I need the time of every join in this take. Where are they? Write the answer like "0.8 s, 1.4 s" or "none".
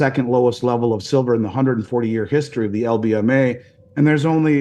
none

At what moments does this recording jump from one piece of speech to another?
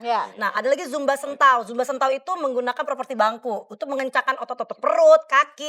none

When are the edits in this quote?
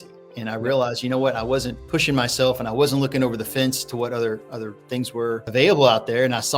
1.8 s, 5.5 s

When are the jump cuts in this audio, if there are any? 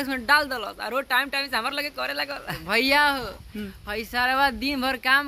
2.6 s

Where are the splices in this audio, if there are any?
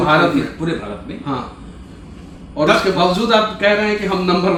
none

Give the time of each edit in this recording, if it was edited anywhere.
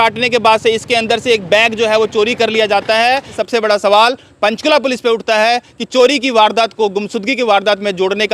3.4 s

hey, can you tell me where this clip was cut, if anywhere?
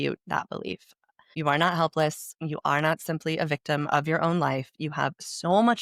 none

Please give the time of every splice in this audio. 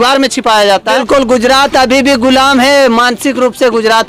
1.0 s

